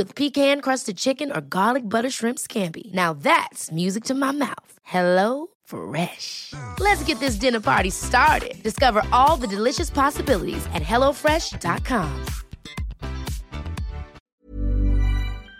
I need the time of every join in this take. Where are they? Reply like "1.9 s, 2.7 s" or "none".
14.3 s